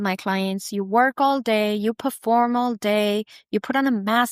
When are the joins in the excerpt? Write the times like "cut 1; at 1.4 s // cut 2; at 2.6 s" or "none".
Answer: none